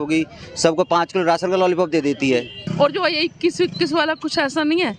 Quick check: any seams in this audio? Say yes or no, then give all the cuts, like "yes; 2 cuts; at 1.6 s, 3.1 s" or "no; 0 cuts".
yes; 1 cut; at 2.6 s